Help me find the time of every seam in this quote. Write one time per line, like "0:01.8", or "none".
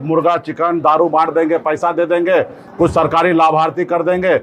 none

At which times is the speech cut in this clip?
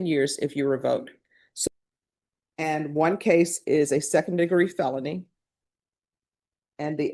0:01.7

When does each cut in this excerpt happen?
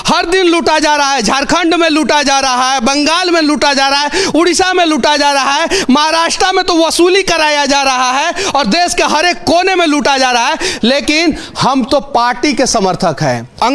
none

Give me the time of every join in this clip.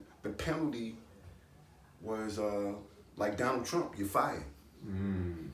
none

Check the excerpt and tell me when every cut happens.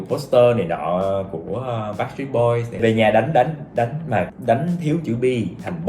0:02.7
0:04.3

